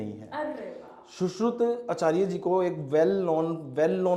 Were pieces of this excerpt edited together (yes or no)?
no